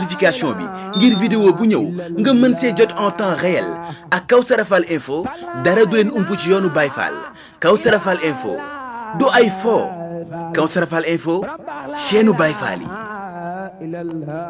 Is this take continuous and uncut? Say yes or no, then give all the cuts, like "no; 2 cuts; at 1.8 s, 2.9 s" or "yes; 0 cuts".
yes; 0 cuts